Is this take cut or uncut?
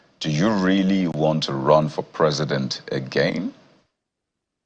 uncut